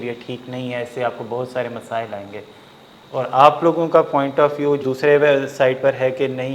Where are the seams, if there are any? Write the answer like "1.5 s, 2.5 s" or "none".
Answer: 4.8 s